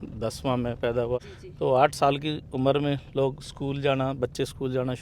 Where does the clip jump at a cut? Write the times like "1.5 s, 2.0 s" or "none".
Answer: 1.2 s